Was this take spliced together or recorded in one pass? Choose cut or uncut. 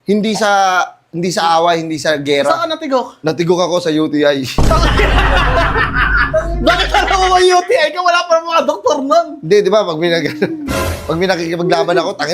uncut